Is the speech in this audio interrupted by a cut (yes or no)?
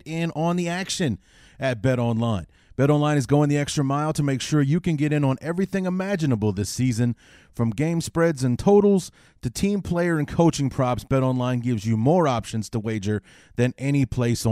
no